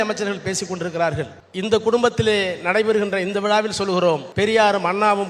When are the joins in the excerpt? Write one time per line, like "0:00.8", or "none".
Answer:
0:01.4
0:04.3

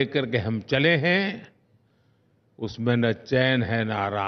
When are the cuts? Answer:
none

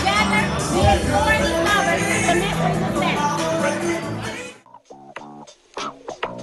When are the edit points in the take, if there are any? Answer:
0:04.3

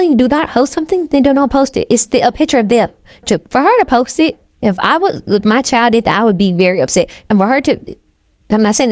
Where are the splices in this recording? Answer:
0:03.2

